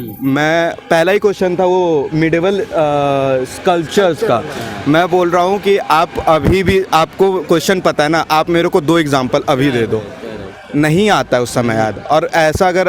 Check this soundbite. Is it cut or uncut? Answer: uncut